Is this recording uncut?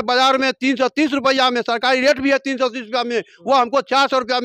yes; 0 cuts

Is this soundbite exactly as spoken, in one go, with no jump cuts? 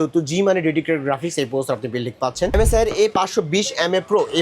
no; 1 cut; at 2.5 s

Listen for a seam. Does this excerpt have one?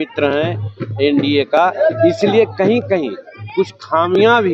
no; 0 cuts

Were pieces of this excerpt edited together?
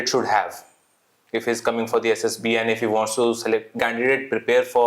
yes; 1 cut; at 3.8 s

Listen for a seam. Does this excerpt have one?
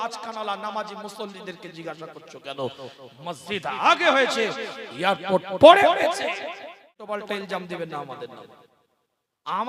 yes; 1 cut; at 7.1 s

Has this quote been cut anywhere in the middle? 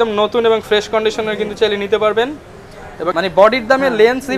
yes; 1 cut; at 3.1 s

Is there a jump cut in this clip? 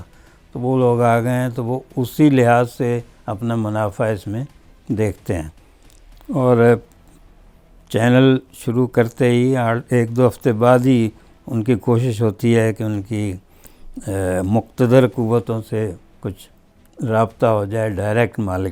no; 0 cuts

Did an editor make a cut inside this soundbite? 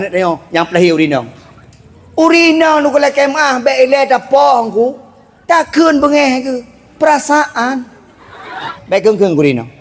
yes; 1 cut; at 8.8 s

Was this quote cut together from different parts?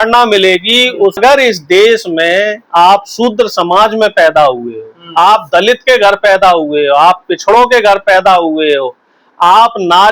yes; 1 cut; at 1.2 s

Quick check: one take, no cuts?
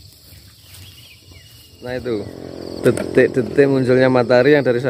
no; 1 cut; at 1.8 s

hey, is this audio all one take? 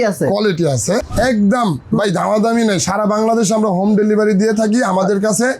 no; 1 cut; at 1.0 s

